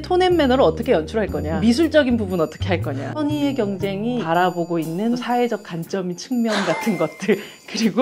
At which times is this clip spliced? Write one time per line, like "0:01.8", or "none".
0:01.5
0:03.1
0:04.2
0:05.2